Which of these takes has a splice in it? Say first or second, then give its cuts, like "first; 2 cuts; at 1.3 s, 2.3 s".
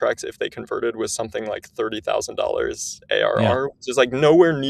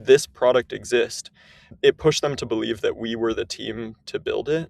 second; 1 cut; at 1.6 s